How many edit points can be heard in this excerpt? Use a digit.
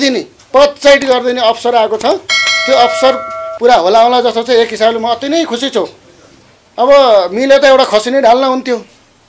0